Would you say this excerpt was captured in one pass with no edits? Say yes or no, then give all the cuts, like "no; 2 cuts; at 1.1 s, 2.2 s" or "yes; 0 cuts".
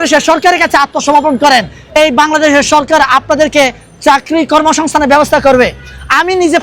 yes; 0 cuts